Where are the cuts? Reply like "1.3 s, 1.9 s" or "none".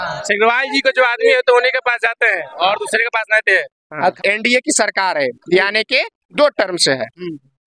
4.2 s